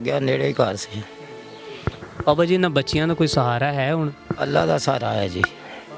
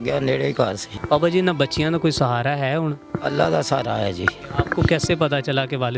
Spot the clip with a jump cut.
second; 2 cuts; at 0.9 s, 4.4 s

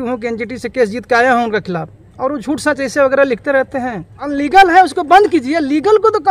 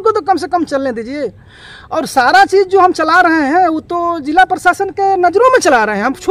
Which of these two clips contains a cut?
first; 1 cut; at 4.2 s

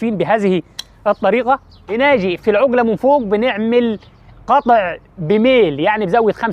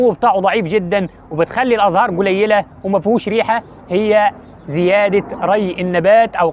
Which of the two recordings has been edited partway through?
first; 1 cut; at 1.8 s

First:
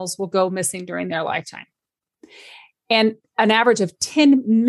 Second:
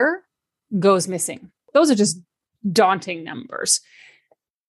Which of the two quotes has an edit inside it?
second; 1 cut; at 1.7 s

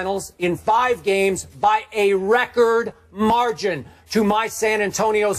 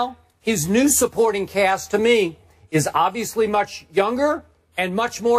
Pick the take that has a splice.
first; 1 cut; at 1.1 s

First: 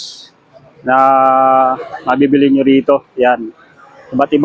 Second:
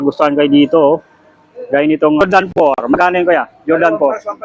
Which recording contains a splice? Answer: second; 1 cut; at 2.2 s

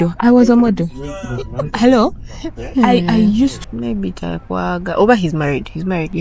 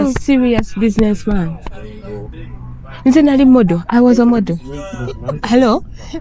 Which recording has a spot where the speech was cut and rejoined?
first; 1 cut; at 3.6 s

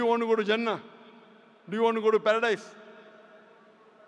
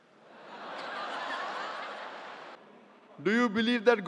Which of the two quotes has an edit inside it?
second; 1 cut; at 2.5 s

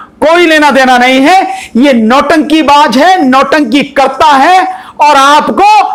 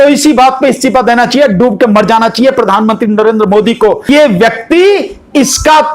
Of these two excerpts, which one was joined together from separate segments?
second; 1 cut; at 4.1 s

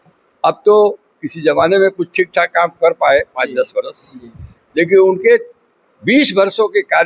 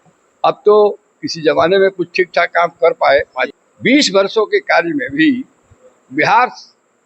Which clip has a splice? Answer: second; 1 cut; at 3.4 s

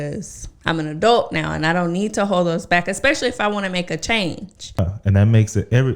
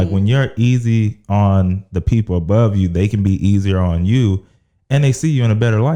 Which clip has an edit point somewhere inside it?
first; 1 cut; at 4.8 s

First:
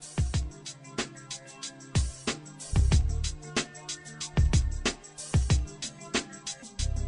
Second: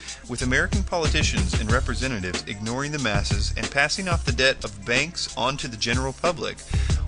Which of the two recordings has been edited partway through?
first; 1 cut; at 5.0 s

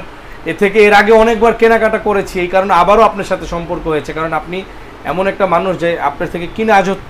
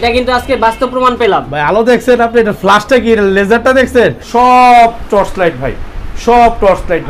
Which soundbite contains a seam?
second; 1 cut; at 4.2 s

